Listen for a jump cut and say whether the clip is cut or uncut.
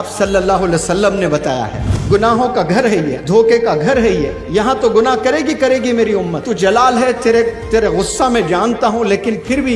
cut